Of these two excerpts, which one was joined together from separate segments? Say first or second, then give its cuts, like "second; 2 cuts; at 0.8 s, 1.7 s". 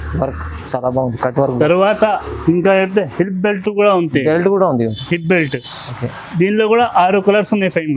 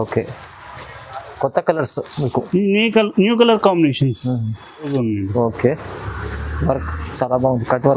second; 1 cut; at 4.9 s